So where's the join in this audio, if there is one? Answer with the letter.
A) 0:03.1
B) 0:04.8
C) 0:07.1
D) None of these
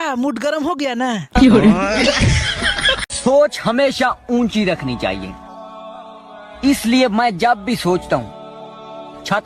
A